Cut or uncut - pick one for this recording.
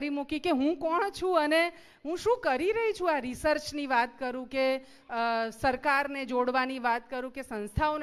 uncut